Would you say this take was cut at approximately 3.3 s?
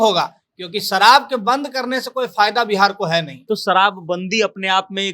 yes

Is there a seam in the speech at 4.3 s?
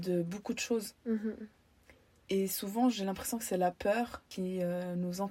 yes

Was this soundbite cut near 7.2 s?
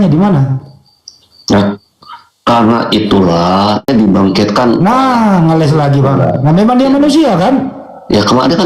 no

